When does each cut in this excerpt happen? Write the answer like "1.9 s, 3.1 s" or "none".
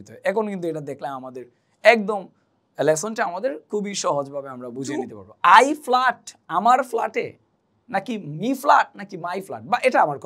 5.2 s